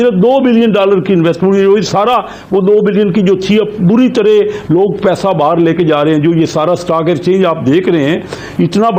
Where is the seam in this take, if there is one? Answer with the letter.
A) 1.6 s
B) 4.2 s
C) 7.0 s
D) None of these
D